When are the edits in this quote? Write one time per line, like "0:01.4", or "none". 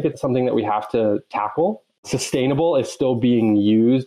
0:01.9